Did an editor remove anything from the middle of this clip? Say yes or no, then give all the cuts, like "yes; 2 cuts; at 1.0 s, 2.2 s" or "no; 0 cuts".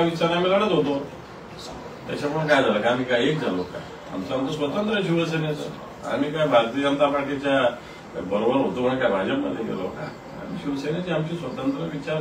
no; 0 cuts